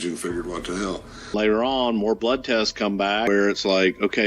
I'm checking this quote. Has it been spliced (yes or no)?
yes